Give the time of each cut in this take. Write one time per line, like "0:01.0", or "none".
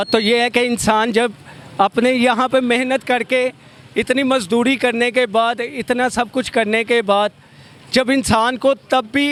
none